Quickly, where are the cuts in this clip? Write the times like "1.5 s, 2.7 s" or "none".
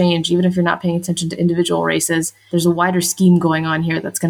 2.4 s